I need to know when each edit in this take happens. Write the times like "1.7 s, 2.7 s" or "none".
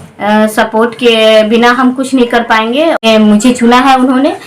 3.0 s